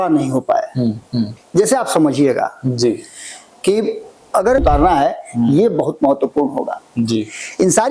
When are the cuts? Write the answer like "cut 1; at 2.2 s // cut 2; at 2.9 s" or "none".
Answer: cut 1; at 4.6 s